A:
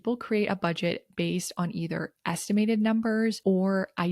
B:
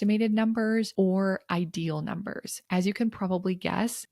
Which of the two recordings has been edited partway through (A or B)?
B